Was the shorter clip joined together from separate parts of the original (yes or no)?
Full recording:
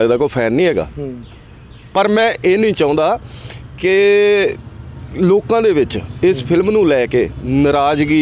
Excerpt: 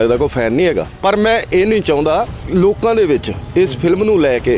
yes